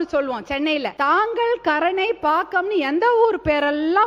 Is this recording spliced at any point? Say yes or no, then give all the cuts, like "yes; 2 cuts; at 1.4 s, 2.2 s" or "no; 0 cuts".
yes; 1 cut; at 0.9 s